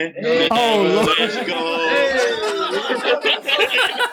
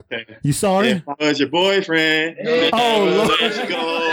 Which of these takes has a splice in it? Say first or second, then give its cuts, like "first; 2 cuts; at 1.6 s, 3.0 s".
second; 1 cut; at 1.1 s